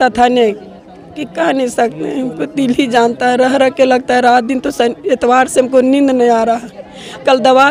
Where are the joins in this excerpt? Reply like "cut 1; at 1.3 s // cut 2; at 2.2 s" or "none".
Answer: none